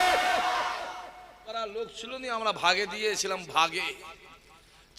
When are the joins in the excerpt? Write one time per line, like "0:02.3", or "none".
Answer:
0:01.4